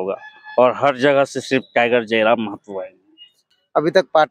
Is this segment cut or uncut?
cut